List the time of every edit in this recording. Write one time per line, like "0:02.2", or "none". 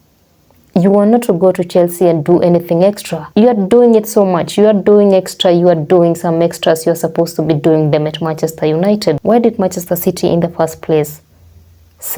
0:03.1
0:09.2